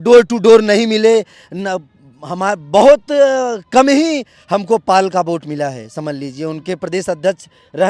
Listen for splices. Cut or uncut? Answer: uncut